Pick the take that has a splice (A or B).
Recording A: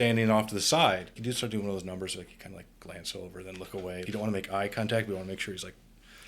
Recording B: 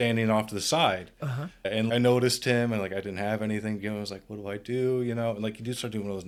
A